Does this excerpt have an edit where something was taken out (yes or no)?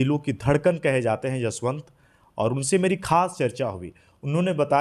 no